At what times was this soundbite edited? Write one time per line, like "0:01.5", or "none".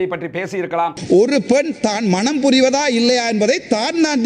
0:01.0